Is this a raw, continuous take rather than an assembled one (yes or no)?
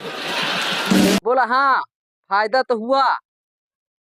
no